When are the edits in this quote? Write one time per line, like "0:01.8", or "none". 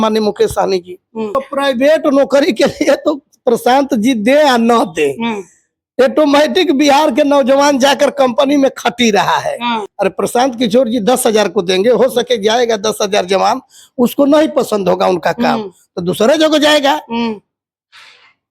0:01.3
0:09.9